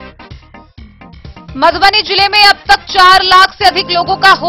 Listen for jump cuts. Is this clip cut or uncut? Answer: cut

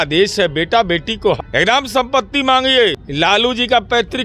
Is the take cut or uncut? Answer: cut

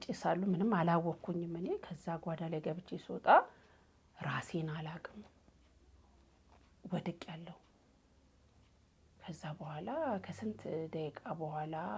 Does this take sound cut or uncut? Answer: uncut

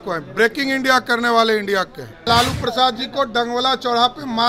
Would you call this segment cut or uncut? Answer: cut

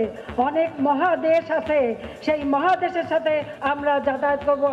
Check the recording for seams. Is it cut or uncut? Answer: cut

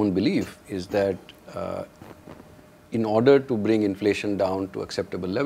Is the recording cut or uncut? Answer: uncut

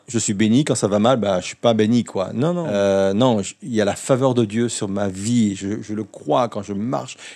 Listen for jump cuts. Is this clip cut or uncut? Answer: cut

